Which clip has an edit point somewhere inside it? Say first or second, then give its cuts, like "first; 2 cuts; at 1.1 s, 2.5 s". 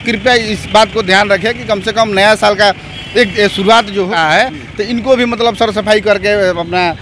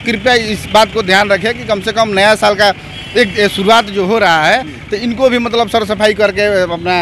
first; 1 cut; at 4.1 s